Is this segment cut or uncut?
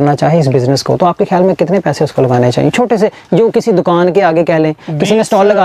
uncut